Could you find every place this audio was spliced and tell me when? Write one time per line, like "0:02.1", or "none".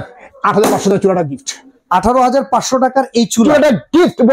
none